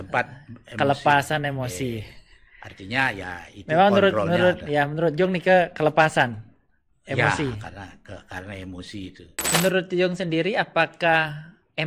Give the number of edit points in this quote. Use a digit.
1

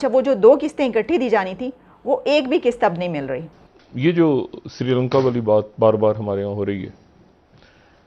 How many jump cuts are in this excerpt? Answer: 1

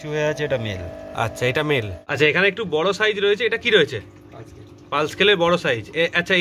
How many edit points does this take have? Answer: 1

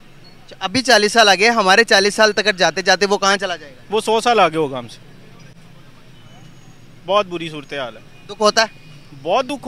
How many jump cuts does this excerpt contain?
0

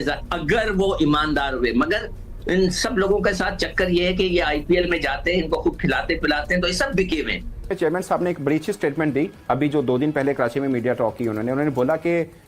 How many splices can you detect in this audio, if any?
1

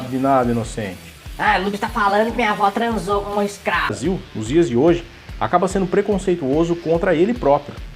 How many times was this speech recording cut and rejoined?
1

